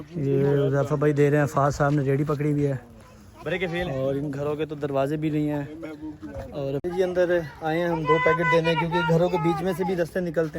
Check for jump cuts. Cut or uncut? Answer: cut